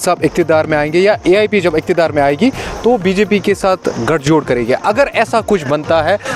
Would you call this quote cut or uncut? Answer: uncut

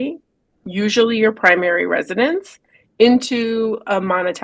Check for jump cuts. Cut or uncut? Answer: uncut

